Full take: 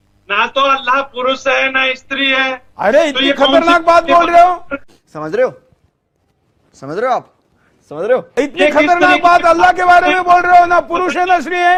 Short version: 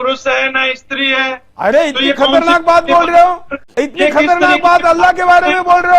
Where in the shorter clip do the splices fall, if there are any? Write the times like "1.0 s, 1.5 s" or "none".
3.7 s

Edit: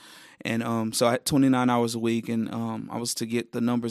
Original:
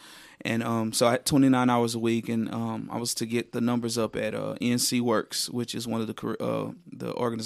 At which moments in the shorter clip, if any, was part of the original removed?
none

